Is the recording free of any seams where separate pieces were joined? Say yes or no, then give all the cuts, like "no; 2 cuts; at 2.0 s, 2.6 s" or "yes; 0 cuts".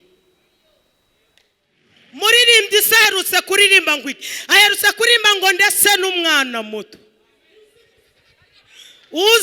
no; 1 cut; at 1.9 s